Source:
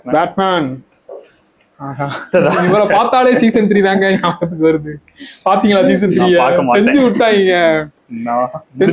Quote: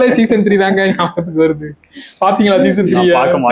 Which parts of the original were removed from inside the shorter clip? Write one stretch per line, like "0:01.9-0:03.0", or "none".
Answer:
none